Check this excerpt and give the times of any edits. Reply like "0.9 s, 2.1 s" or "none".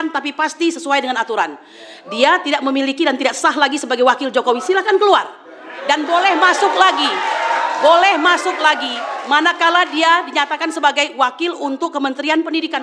none